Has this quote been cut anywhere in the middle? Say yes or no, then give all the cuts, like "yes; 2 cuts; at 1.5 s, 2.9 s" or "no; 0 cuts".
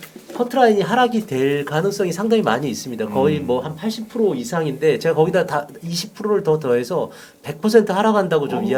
no; 0 cuts